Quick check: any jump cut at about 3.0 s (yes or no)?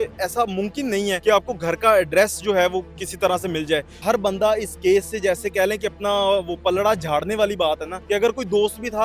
yes